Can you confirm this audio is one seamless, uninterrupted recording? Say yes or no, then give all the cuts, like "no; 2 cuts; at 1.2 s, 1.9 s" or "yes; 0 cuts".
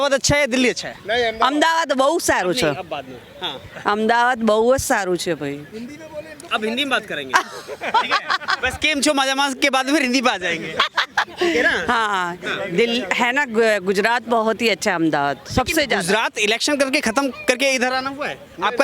yes; 0 cuts